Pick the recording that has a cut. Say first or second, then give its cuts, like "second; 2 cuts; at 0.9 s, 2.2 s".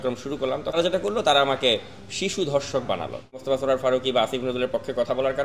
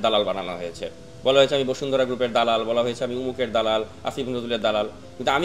first; 2 cuts; at 0.8 s, 3.4 s